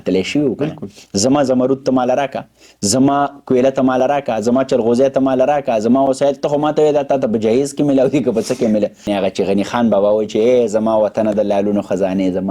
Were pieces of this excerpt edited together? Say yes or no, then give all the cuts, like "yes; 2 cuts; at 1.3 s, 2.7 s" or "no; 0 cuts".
yes; 1 cut; at 9.1 s